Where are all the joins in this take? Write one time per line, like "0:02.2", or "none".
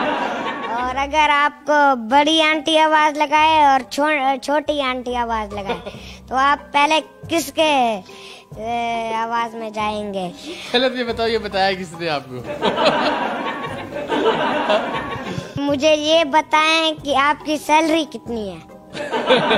0:15.6